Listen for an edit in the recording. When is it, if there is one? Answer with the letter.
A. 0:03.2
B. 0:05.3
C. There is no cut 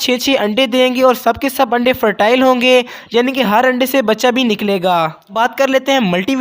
B